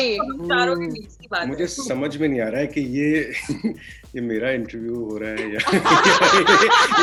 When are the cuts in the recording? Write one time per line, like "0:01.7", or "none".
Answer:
none

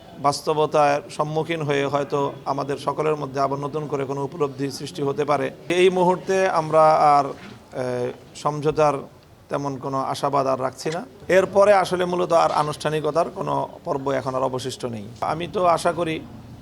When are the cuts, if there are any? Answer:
0:05.7
0:11.1
0:15.2

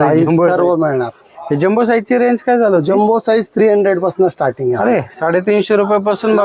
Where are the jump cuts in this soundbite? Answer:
none

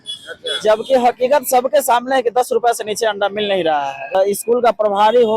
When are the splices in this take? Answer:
0:04.1

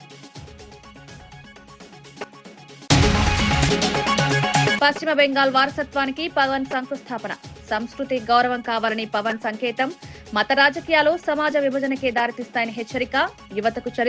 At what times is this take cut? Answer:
0:03.7

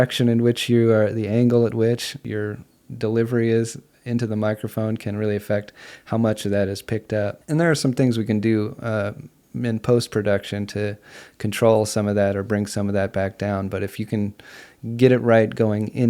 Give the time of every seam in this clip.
0:02.2
0:07.4

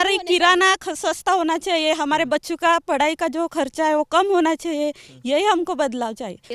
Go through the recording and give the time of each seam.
none

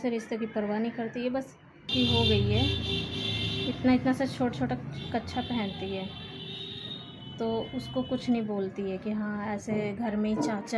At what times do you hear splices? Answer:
0:01.9

